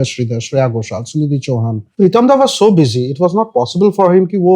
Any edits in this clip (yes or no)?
yes